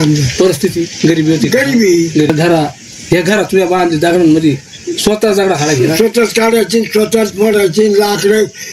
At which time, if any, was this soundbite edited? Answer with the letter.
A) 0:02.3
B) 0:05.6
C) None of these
A